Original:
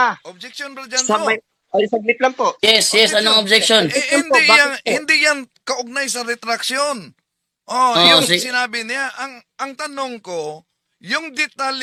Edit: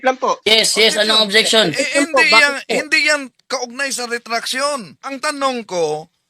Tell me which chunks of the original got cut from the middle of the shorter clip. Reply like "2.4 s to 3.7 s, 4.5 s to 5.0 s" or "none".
7.2 s to 9.6 s